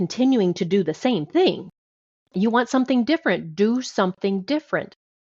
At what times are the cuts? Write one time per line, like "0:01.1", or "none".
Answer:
0:02.3